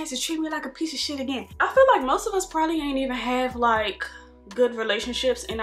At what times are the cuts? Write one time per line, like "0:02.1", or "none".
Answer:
0:01.5